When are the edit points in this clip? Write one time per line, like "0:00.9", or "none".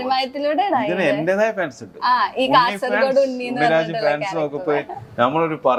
none